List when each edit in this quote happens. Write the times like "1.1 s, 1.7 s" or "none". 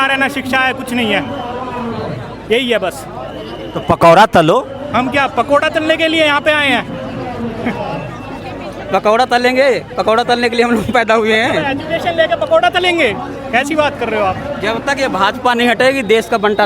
none